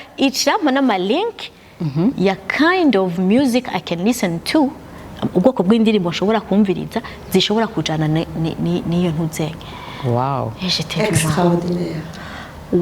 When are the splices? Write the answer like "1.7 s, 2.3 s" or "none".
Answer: none